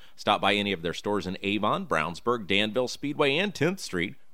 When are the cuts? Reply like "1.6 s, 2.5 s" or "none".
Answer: none

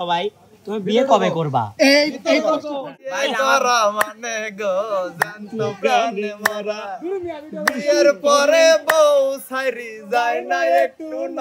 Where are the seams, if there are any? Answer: 2.7 s

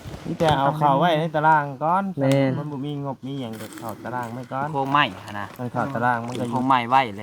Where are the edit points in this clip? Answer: 4.7 s, 5.5 s, 6.5 s

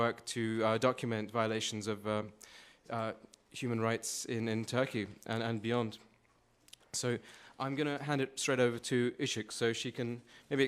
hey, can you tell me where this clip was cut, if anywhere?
6.6 s

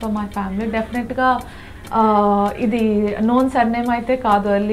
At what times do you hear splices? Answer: none

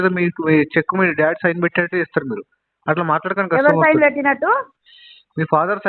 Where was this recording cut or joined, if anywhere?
none

